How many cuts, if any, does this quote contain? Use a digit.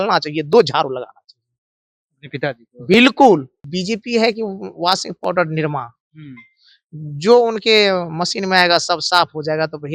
1